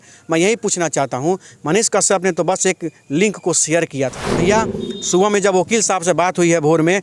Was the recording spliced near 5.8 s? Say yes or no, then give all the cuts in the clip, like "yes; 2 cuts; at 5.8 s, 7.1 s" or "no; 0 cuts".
no; 1 cut; at 4.2 s